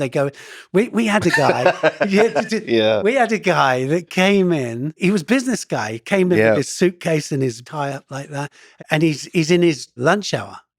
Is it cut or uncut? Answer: cut